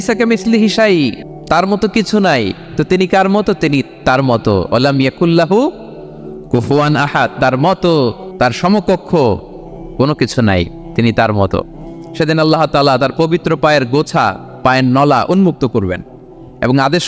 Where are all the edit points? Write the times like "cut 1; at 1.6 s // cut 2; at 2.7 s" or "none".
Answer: cut 1; at 1.3 s // cut 2; at 8.2 s